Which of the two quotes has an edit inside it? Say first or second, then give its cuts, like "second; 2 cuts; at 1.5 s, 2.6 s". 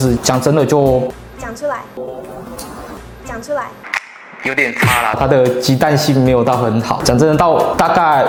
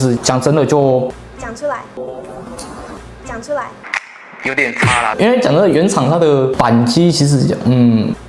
second; 1 cut; at 5.2 s